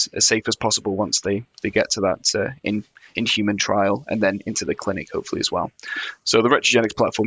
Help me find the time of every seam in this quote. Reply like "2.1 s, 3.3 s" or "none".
none